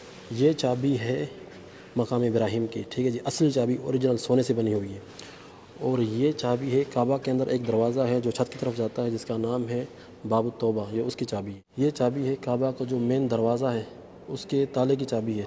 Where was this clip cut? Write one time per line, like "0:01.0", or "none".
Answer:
none

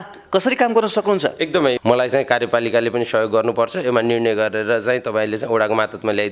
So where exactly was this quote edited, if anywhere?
0:01.8

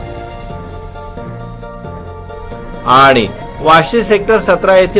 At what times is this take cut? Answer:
none

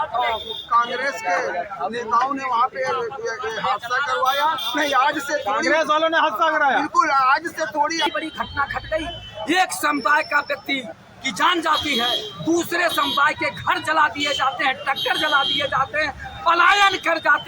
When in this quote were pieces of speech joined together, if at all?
0:08.1

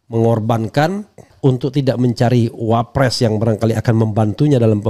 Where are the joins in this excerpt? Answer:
0:01.3

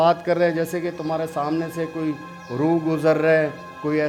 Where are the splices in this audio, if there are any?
none

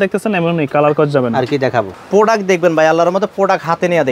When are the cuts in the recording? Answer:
0:02.0

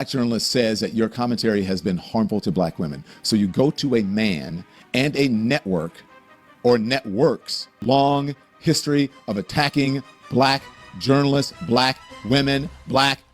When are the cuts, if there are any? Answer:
0:07.7

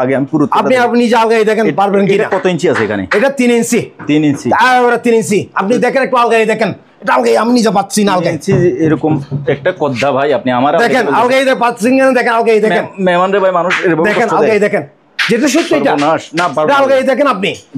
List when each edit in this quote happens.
none

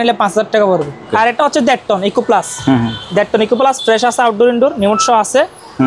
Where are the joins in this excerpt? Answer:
0:01.1

